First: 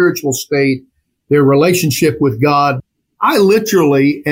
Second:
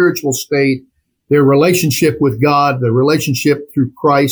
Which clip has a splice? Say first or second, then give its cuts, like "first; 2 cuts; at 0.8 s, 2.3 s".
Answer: first; 1 cut; at 2.8 s